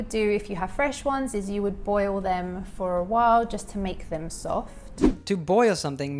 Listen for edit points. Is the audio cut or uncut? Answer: uncut